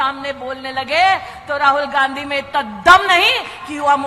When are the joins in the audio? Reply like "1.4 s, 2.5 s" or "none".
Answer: none